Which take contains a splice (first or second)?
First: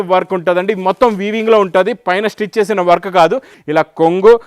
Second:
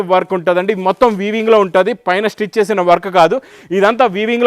first